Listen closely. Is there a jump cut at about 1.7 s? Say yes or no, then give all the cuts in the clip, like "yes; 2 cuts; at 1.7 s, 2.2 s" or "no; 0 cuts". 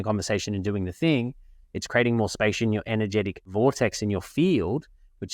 no; 1 cut; at 3.5 s